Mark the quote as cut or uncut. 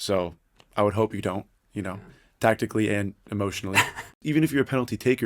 cut